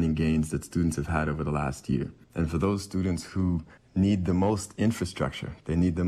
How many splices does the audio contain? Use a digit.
2